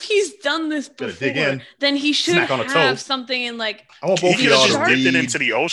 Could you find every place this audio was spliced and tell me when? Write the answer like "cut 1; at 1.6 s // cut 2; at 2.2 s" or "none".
cut 1; at 3.9 s